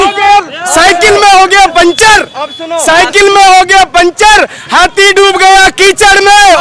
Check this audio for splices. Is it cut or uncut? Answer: uncut